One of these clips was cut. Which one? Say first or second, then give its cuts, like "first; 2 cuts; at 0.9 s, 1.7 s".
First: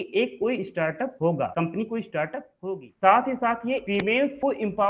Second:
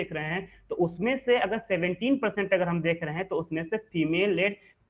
first; 3 cuts; at 1.3 s, 2.5 s, 4.2 s